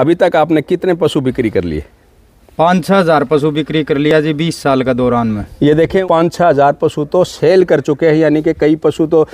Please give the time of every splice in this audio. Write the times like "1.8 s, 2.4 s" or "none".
none